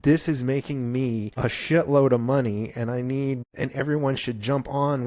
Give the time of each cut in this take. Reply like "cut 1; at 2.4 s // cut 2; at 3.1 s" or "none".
cut 1; at 1.3 s // cut 2; at 3.5 s

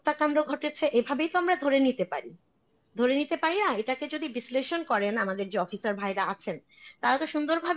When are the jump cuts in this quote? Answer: none

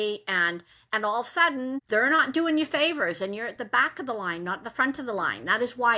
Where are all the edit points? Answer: cut 1; at 1.8 s

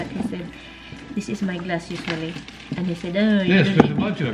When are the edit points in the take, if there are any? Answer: none

